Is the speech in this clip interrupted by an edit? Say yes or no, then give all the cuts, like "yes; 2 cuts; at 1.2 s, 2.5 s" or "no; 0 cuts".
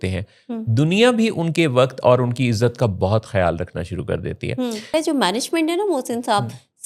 yes; 1 cut; at 4.9 s